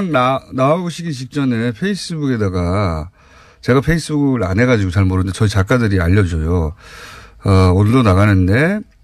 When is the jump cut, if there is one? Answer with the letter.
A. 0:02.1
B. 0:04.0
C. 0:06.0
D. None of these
D